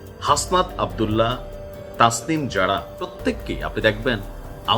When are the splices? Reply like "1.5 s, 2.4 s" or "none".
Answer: 3.1 s